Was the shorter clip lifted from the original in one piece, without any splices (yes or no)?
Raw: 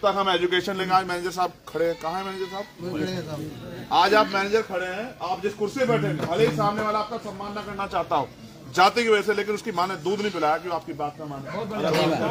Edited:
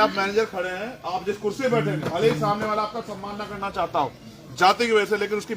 yes